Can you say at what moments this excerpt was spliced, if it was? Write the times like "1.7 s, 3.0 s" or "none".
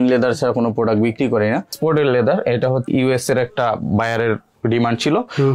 1.7 s, 2.9 s